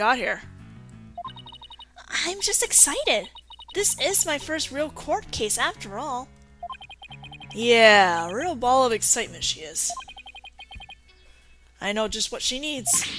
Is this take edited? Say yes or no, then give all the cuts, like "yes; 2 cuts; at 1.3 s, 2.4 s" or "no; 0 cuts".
yes; 1 cut; at 1.5 s